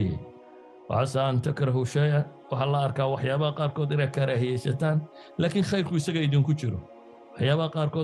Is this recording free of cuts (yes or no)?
yes